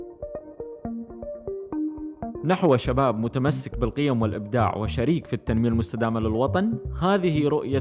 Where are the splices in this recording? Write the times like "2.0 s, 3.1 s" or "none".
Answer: 2.4 s